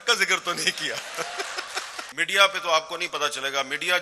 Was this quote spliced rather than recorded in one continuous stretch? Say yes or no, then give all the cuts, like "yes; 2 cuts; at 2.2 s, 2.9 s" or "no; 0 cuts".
yes; 1 cut; at 2.0 s